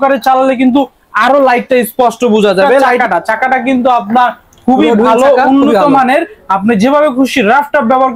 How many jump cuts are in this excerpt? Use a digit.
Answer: 1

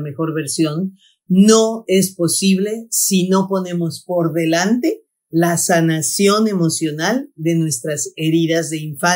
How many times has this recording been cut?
0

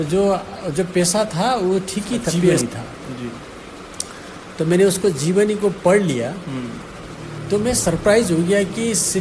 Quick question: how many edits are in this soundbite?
1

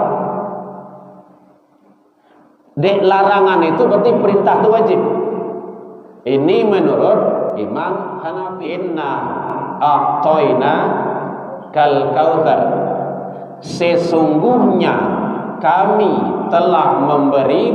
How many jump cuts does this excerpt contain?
1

